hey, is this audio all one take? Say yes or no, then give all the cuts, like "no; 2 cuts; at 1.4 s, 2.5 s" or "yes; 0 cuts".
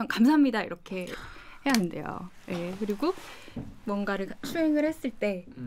yes; 0 cuts